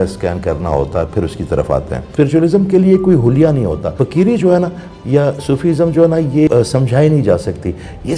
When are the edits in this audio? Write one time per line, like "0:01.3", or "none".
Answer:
0:02.0
0:03.9
0:06.5